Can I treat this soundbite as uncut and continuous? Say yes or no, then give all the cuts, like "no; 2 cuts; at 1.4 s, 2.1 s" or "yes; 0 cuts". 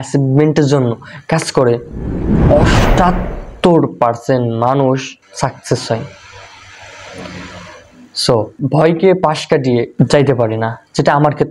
no; 3 cuts; at 5.2 s, 8.6 s, 9.9 s